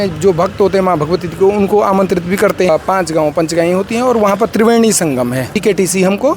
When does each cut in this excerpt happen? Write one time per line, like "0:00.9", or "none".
0:02.7
0:05.6